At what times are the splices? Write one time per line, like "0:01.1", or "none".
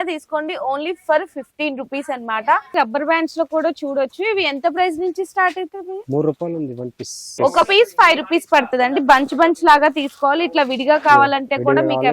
0:02.7
0:07.3